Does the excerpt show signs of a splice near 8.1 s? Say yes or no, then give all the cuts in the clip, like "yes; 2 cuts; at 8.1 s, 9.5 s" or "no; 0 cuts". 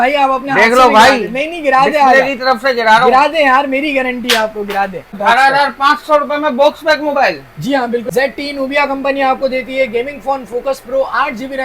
yes; 2 cuts; at 5.0 s, 8.1 s